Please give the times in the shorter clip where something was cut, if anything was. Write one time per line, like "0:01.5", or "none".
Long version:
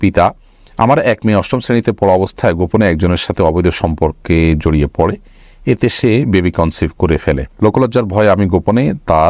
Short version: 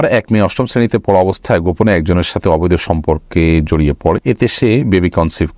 0:04.2